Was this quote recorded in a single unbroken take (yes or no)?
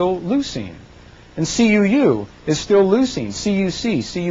no